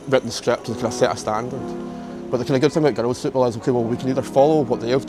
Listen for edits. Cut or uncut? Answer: uncut